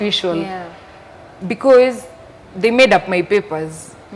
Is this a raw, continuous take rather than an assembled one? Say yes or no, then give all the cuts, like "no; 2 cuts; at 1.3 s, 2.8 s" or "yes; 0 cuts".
yes; 0 cuts